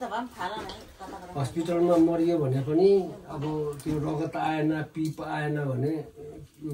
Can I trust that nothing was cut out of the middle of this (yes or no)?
yes